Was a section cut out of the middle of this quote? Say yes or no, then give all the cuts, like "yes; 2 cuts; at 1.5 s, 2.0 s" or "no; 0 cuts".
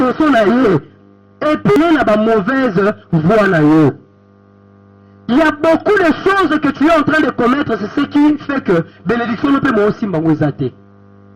yes; 1 cut; at 1.8 s